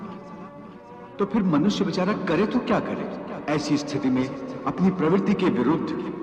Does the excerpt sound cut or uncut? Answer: cut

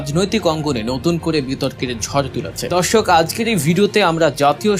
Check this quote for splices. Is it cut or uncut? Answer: cut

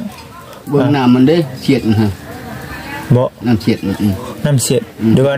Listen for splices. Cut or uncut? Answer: uncut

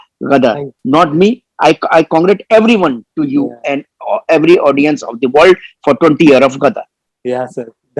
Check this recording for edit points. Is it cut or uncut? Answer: uncut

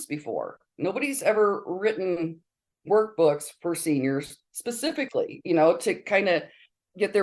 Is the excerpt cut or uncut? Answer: cut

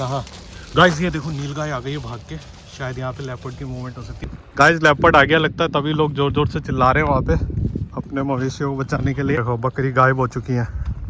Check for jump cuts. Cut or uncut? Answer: cut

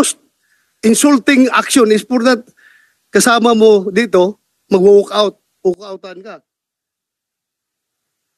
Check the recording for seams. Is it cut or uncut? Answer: uncut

